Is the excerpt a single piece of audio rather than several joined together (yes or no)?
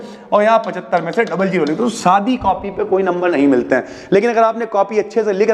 yes